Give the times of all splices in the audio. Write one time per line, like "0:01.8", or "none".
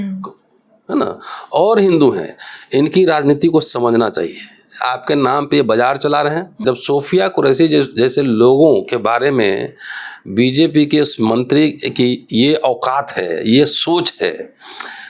0:06.6